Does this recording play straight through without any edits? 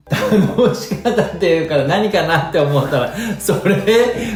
yes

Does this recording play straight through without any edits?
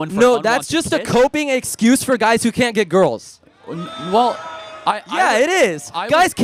yes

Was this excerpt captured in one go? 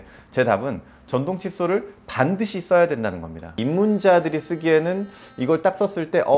no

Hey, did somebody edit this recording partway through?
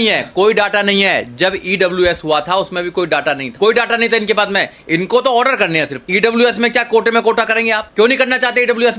yes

